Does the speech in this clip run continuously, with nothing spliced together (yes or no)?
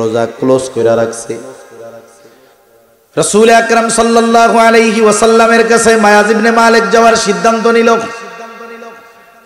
no